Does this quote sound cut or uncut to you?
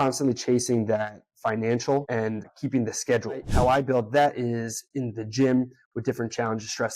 cut